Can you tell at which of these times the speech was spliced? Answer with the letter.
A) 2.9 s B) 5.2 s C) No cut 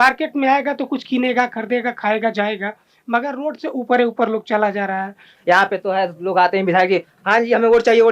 B